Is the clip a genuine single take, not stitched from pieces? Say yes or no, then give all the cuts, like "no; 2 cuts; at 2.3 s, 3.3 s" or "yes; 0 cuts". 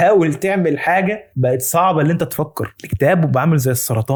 yes; 0 cuts